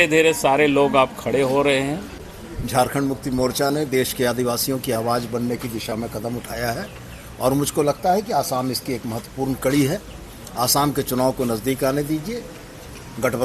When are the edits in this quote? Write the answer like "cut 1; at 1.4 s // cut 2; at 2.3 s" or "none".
cut 1; at 2.3 s